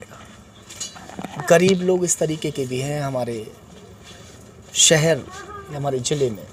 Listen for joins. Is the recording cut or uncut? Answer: uncut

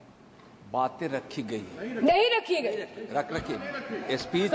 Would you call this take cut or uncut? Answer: uncut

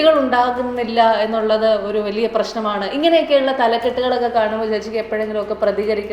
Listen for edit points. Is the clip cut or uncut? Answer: uncut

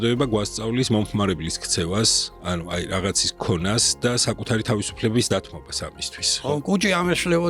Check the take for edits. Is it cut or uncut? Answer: cut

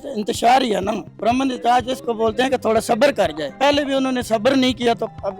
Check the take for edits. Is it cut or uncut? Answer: cut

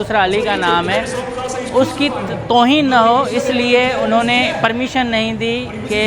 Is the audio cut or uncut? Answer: uncut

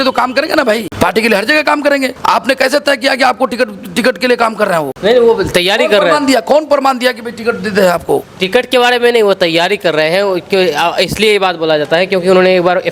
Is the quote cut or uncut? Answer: cut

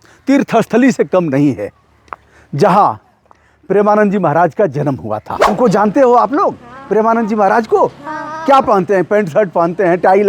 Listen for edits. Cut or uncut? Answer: cut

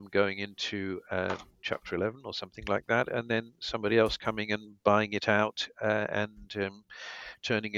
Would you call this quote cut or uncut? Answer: uncut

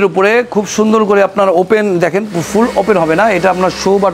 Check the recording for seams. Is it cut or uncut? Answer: uncut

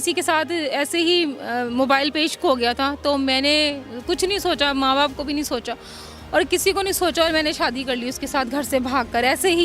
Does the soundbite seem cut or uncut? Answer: uncut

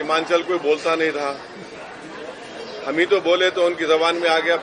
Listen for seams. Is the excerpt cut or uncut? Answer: uncut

